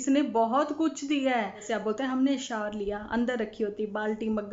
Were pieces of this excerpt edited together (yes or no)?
yes